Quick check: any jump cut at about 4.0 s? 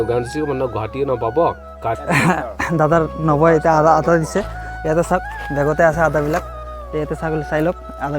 no; 1 cut; at 2.0 s

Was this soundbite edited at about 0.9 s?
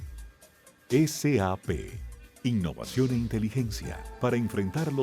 yes; 1 cut; at 0.9 s

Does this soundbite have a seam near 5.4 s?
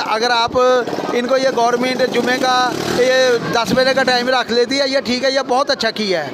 no; 0 cuts

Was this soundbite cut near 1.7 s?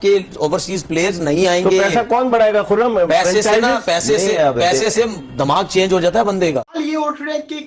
no; 1 cut; at 6.8 s

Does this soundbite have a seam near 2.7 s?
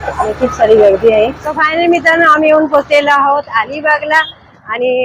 no; 1 cut; at 1.4 s

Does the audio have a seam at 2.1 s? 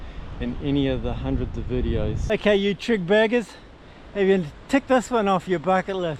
yes; 1 cut; at 2.1 s

